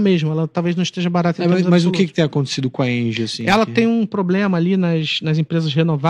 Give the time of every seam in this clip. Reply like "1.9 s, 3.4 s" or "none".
none